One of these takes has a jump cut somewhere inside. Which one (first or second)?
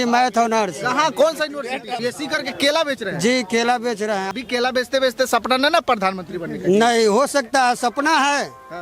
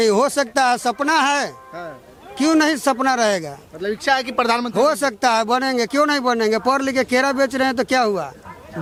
first